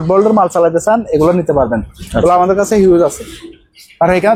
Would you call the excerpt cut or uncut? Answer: uncut